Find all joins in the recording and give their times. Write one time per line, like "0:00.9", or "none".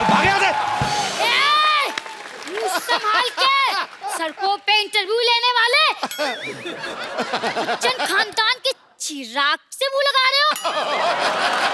0:01.1
0:04.0